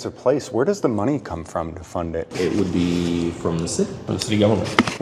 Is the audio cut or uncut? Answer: cut